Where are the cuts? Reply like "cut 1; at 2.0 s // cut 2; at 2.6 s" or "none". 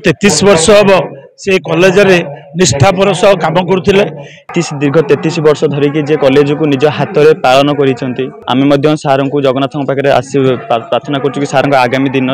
cut 1; at 4.5 s // cut 2; at 8.3 s